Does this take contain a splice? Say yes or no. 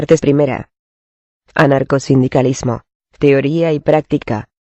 no